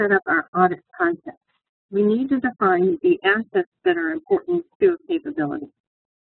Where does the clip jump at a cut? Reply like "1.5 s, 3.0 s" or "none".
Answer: 3.4 s